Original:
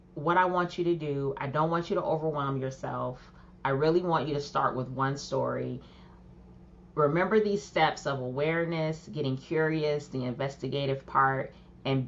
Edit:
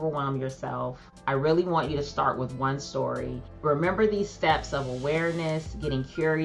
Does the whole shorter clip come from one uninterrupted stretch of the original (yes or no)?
no